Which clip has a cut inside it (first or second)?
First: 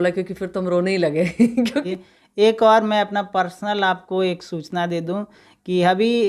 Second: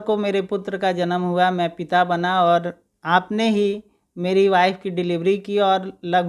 first